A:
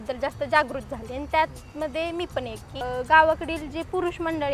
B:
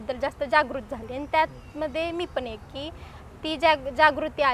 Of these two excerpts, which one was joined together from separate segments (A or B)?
A